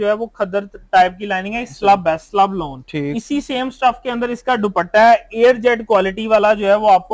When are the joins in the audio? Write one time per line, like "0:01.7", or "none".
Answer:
none